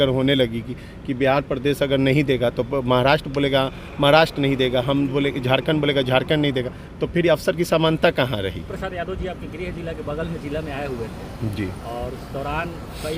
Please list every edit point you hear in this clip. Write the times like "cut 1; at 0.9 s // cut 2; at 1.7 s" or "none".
cut 1; at 8.6 s